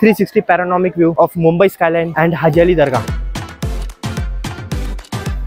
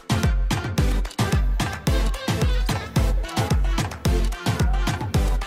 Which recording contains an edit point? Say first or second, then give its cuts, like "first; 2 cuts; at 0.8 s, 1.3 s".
first; 3 cuts; at 1.1 s, 2.1 s, 3.0 s